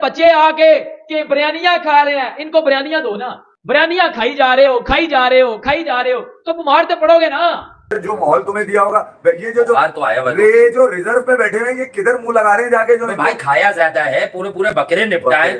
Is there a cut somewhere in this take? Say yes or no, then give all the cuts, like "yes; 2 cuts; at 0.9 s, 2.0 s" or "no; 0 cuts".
yes; 1 cut; at 7.8 s